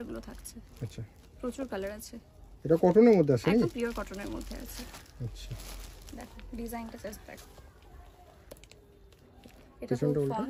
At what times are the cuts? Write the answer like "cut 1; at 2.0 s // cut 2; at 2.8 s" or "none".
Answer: none